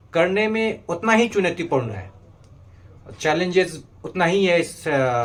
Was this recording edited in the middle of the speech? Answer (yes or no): no